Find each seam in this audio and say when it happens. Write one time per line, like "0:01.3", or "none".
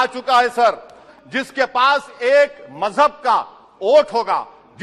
0:01.1